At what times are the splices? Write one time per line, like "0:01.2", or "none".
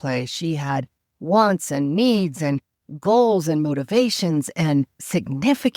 none

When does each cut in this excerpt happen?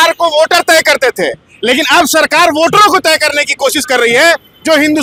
none

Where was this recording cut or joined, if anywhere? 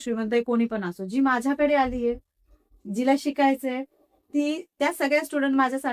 none

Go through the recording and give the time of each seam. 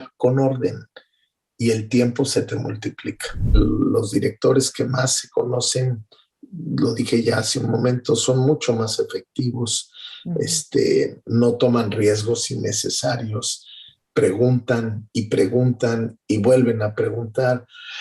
0:03.6

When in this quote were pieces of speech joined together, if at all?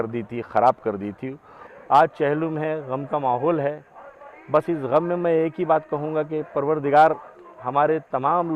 0:01.6

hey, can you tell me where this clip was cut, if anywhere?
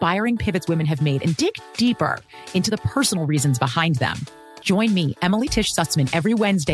none

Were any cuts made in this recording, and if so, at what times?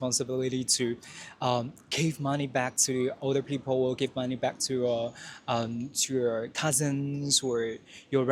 none

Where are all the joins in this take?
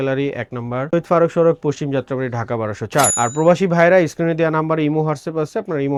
none

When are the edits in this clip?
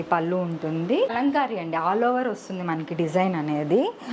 0:01.1

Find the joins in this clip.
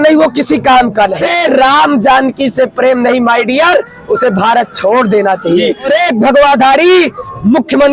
0:01.2
0:05.9

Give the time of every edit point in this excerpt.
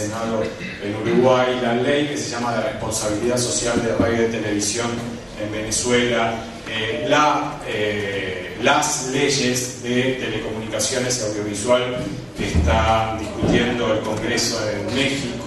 0:03.4

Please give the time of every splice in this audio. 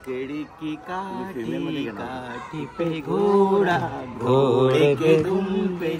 none

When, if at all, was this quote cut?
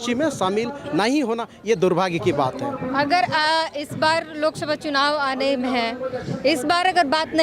none

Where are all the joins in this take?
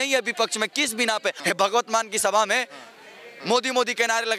0:01.4

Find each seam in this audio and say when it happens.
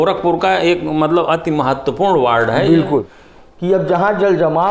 0:03.1

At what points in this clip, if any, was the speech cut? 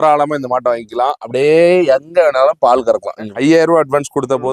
0:03.3

